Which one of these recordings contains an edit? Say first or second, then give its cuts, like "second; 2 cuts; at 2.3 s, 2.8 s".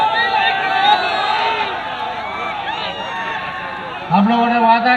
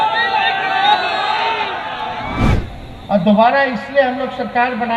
second; 1 cut; at 2.5 s